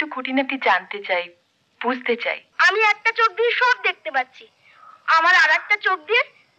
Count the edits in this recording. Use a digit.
1